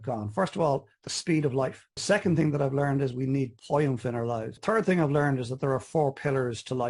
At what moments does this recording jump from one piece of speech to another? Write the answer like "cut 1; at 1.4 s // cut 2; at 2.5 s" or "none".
cut 1; at 1.9 s // cut 2; at 4.5 s

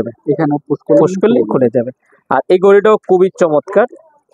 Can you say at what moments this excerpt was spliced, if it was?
none

